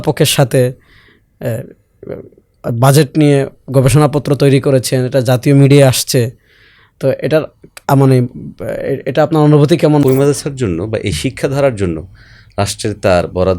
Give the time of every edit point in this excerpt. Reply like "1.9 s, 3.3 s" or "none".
10.0 s